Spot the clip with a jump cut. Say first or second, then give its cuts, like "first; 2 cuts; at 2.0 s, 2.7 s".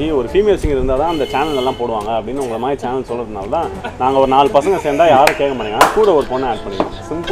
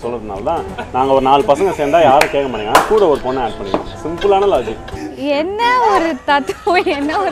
second; 1 cut; at 5.2 s